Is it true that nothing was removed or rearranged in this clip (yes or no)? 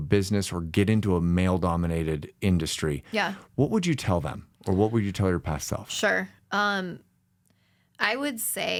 yes